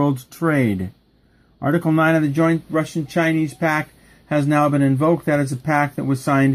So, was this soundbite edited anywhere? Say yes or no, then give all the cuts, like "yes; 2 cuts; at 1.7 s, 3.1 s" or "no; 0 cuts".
yes; 1 cut; at 2.9 s